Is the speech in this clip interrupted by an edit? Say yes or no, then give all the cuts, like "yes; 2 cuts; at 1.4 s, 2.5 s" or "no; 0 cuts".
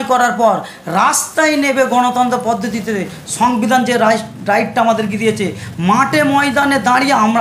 no; 0 cuts